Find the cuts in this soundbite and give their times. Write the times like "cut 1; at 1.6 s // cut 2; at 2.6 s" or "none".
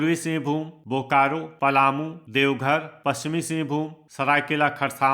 cut 1; at 1.5 s // cut 2; at 2.2 s // cut 3; at 4.0 s